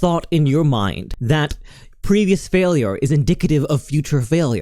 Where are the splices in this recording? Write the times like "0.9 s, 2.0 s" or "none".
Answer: 1.1 s